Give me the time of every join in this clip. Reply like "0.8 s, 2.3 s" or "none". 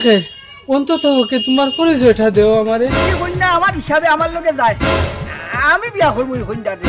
3.0 s